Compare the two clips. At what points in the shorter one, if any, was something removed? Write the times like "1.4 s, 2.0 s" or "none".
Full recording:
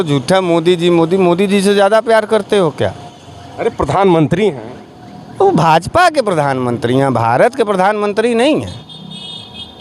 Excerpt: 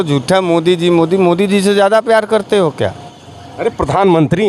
none